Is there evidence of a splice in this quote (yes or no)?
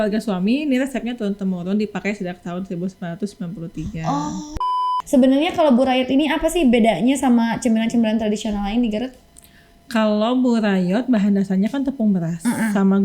yes